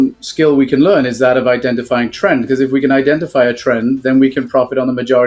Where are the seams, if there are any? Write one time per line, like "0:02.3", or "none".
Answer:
none